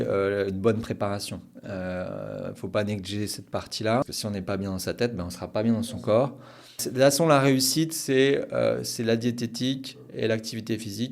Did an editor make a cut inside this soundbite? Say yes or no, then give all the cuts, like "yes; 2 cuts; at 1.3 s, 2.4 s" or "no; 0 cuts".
yes; 2 cuts; at 4.0 s, 6.9 s